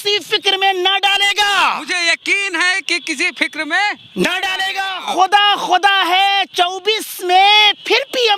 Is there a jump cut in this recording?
no; 0 cuts

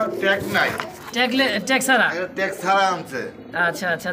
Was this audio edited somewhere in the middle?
no; 0 cuts

